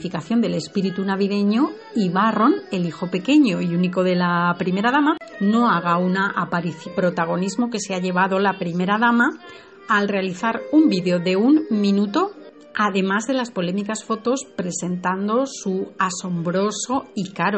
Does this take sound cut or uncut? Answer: uncut